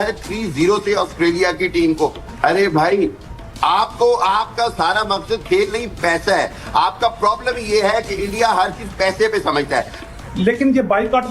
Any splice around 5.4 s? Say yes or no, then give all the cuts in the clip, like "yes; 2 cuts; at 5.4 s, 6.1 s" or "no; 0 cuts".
no; 2 cuts; at 2.3 s, 10.0 s